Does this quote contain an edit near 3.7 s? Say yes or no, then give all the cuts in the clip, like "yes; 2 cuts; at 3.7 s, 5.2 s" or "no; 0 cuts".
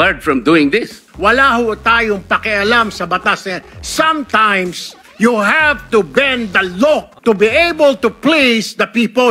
no; 2 cuts; at 1.1 s, 7.1 s